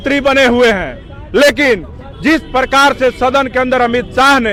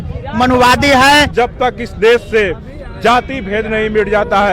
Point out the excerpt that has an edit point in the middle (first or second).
second